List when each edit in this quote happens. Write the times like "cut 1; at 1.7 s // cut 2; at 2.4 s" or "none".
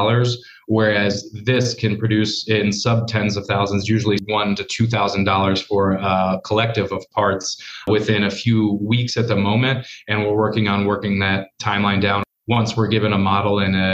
cut 1; at 4.2 s // cut 2; at 7.9 s // cut 3; at 12.2 s